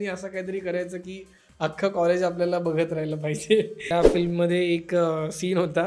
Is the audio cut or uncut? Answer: cut